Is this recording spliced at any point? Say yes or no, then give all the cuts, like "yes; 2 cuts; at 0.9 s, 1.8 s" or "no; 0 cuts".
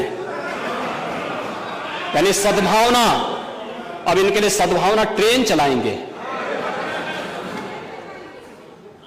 no; 0 cuts